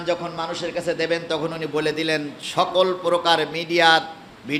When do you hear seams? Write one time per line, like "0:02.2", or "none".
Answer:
none